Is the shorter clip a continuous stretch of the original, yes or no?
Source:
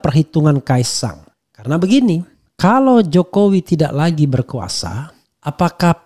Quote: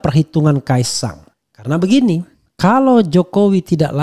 yes